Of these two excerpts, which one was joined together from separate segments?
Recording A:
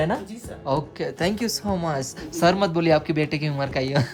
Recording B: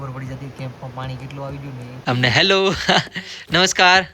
B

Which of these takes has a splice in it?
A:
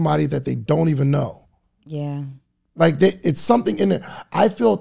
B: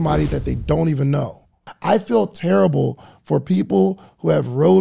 B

